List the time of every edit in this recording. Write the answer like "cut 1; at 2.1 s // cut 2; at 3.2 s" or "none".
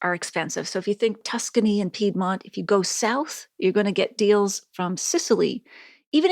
cut 1; at 1.2 s